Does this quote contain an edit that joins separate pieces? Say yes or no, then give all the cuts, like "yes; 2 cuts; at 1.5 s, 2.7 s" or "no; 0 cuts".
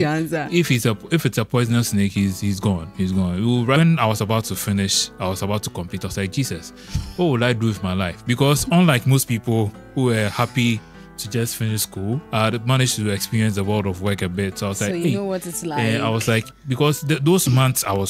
yes; 1 cut; at 3.8 s